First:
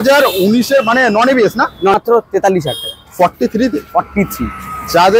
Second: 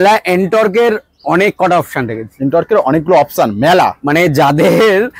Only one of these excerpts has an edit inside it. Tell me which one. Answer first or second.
first